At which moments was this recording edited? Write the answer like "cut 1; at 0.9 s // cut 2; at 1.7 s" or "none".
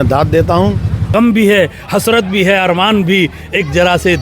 cut 1; at 1.1 s